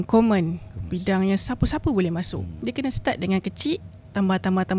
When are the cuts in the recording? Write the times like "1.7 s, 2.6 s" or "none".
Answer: 2.4 s